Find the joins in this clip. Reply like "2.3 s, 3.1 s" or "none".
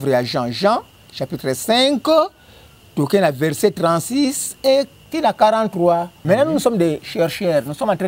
6.1 s

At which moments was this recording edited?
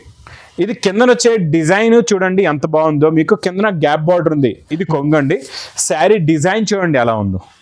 4.7 s

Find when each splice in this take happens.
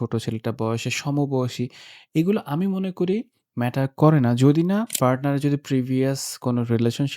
4.9 s

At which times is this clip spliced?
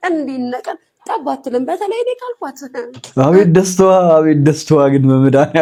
none

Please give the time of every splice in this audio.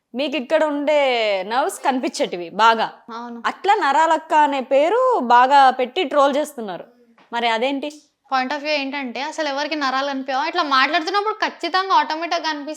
8.2 s

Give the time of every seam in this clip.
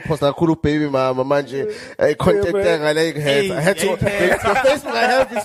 none

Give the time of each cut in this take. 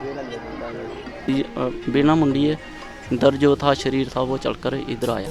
1.2 s

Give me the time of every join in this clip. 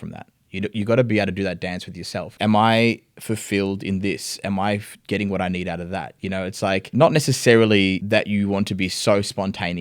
2.3 s, 6.9 s, 8.0 s

